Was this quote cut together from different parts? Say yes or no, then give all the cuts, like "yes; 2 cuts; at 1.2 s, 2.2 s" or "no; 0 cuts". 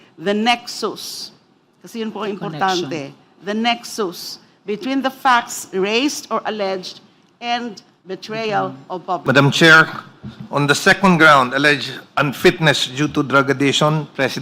yes; 1 cut; at 9.2 s